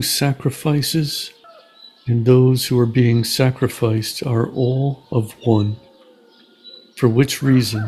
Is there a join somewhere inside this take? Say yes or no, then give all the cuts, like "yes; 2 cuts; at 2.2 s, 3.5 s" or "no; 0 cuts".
no; 0 cuts